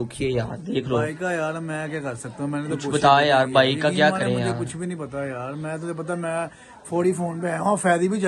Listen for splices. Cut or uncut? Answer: uncut